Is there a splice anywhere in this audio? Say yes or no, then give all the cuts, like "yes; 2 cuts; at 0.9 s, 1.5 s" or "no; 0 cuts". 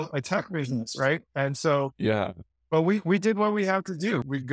no; 0 cuts